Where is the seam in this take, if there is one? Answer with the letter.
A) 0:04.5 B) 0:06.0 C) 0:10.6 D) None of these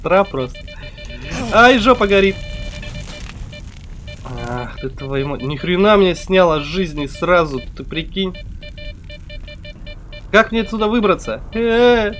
D